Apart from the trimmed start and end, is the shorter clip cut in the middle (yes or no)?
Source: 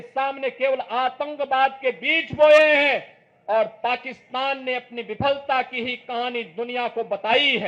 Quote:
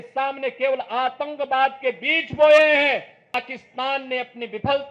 yes